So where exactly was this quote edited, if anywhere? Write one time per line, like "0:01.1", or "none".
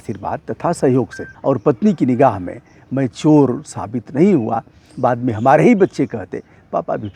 0:01.3